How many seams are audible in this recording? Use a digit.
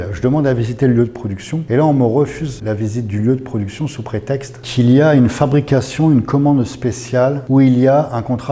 4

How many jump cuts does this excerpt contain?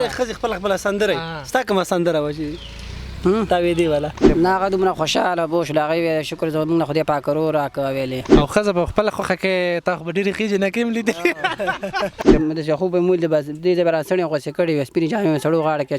3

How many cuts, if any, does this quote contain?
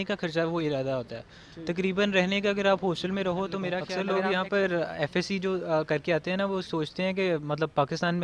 1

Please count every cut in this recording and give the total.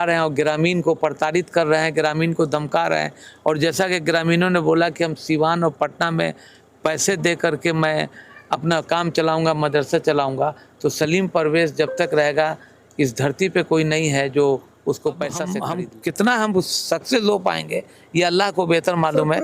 1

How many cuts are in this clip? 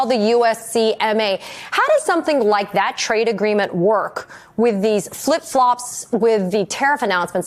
0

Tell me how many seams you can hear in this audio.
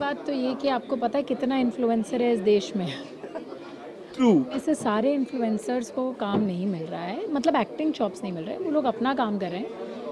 0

